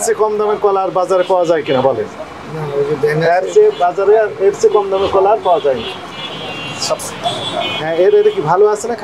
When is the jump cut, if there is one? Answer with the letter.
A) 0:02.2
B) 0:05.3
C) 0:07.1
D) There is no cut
C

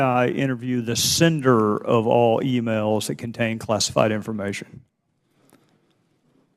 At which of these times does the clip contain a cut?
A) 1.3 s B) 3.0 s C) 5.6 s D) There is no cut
B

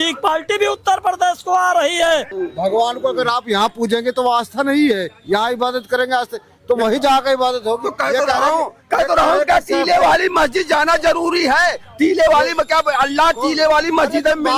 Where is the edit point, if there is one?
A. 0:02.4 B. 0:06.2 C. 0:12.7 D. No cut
A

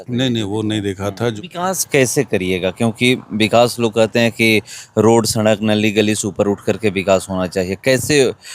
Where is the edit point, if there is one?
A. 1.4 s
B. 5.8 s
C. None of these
A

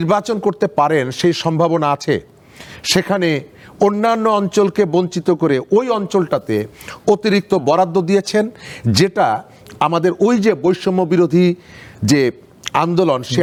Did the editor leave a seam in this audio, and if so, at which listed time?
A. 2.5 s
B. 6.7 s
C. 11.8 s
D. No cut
D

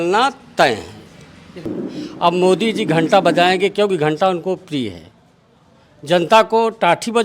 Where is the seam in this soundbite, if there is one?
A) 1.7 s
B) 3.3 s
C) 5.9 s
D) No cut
A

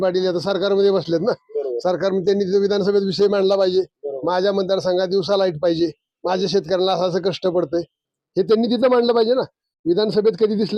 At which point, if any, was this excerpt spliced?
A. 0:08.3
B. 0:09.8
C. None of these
C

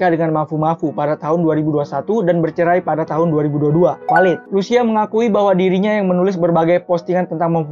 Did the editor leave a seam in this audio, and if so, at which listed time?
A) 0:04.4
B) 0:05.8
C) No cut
A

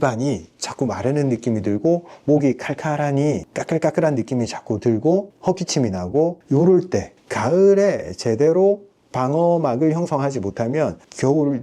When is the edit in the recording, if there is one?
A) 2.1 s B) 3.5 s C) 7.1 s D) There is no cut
C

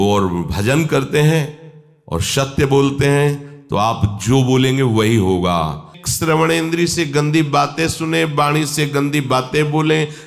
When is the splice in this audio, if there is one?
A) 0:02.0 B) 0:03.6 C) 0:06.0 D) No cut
C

